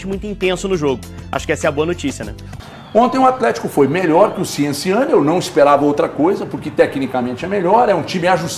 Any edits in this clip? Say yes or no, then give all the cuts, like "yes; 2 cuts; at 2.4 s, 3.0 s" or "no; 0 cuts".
yes; 1 cut; at 2.6 s